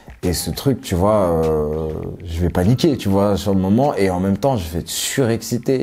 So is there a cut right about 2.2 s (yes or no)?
yes